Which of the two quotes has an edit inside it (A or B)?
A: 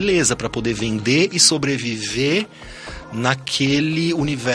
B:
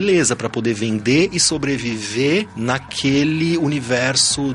B